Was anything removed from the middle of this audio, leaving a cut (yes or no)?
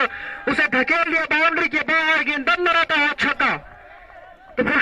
no